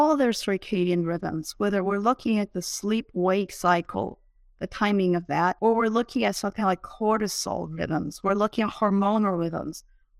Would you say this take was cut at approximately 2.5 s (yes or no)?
no